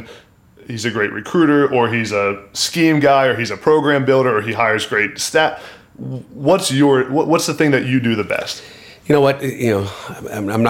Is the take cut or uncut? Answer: uncut